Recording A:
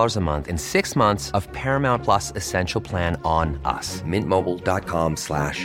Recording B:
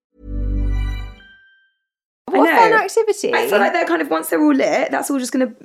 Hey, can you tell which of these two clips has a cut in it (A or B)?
B